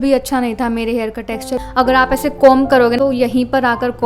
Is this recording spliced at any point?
yes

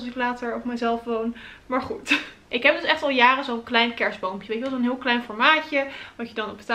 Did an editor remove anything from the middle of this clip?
no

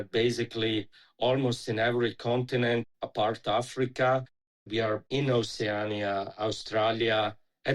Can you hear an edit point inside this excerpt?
yes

